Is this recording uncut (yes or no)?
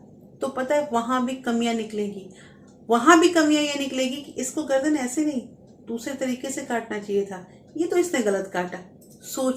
yes